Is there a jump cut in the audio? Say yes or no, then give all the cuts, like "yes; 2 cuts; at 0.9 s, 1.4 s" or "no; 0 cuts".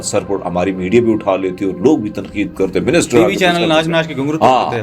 no; 0 cuts